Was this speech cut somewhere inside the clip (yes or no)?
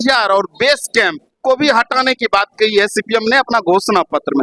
no